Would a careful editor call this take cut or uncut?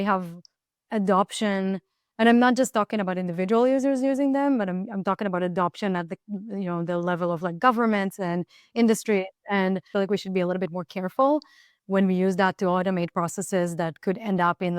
cut